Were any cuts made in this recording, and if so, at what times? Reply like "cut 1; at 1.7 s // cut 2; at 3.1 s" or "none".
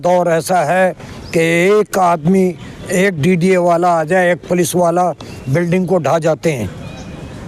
none